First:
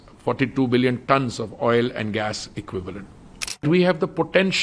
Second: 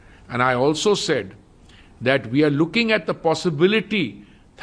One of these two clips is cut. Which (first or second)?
first